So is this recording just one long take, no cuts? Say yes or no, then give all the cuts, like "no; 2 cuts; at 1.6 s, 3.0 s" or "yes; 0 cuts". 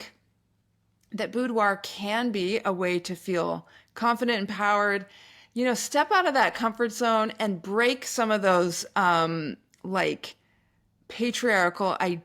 yes; 0 cuts